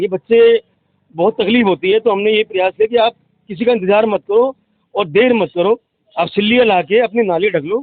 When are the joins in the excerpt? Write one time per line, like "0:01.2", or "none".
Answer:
none

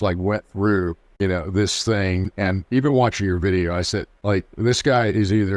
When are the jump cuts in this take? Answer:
0:01.0
0:02.3
0:04.1

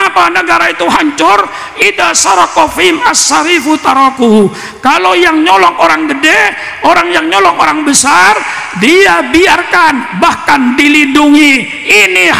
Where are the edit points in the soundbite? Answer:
none

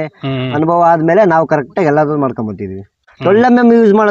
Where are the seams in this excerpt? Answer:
0:03.1

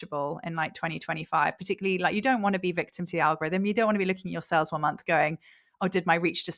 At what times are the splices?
none

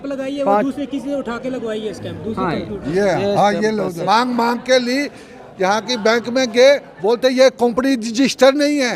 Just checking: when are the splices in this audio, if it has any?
0:03.9

